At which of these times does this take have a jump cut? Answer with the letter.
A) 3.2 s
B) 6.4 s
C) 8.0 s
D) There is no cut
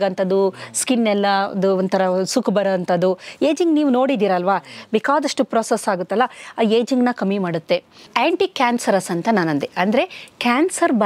C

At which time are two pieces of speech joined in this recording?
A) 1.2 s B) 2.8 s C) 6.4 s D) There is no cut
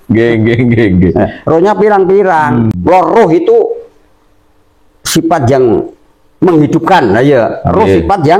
B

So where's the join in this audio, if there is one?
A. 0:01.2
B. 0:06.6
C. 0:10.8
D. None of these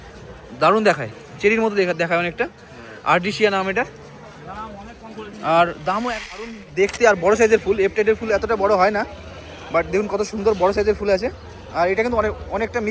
B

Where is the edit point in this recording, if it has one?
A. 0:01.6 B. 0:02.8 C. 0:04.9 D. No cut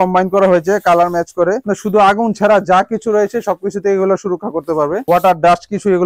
A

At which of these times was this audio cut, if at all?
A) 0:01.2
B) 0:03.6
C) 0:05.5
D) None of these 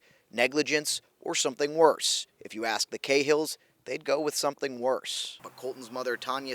C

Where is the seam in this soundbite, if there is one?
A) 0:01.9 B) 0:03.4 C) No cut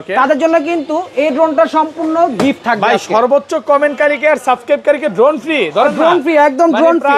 C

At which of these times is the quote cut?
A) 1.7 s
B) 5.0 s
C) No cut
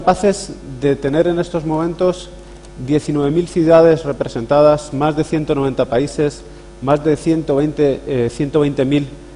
A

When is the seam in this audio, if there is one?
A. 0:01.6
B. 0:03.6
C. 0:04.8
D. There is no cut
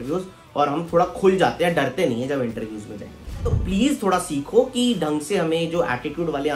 B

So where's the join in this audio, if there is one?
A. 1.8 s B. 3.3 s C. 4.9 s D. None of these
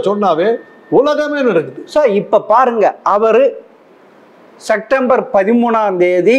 D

